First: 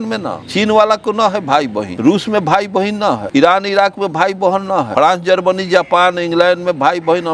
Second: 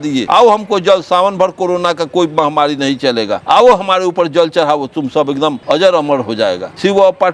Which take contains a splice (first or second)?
first